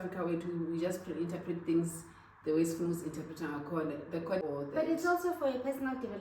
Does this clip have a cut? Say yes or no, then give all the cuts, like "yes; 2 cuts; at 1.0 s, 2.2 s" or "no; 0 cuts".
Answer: yes; 1 cut; at 4.4 s